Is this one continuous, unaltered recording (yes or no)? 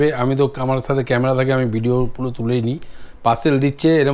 yes